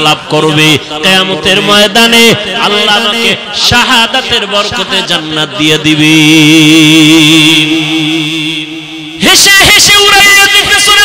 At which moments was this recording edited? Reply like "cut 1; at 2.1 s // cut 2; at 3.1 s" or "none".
cut 1; at 9.0 s

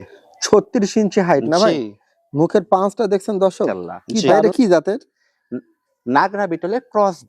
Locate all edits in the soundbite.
cut 1; at 4.4 s

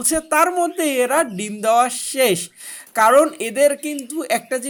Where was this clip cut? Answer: none

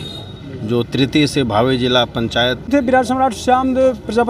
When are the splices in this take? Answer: cut 1; at 2.7 s

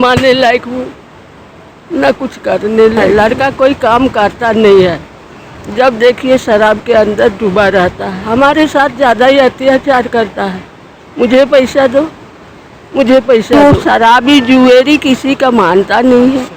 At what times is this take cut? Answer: cut 1; at 3.0 s // cut 2; at 8.1 s // cut 3; at 13.5 s

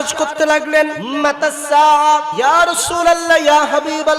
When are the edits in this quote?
cut 1; at 1.0 s // cut 2; at 2.3 s

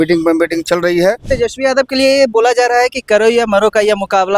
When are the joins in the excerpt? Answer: cut 1; at 1.2 s

